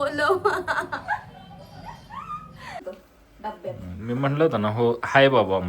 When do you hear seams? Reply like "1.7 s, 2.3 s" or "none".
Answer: 2.8 s